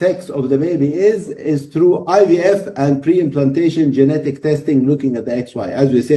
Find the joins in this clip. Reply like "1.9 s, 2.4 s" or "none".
none

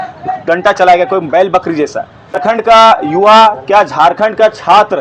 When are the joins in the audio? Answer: 2.4 s

